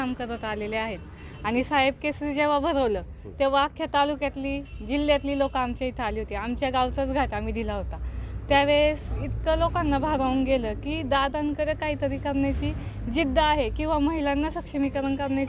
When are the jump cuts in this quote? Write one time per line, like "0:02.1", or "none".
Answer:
none